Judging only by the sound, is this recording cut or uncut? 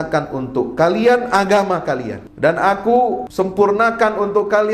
cut